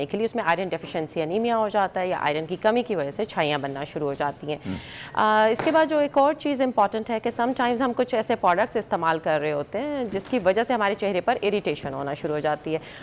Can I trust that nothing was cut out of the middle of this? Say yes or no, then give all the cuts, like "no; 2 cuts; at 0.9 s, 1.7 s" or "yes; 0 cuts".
yes; 0 cuts